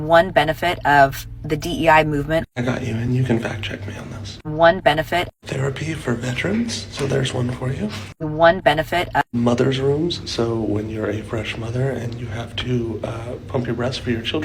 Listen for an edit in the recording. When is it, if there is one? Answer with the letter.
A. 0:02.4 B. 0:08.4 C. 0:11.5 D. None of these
D